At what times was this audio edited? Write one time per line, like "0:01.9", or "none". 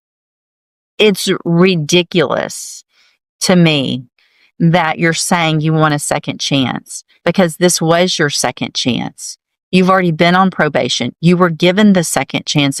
none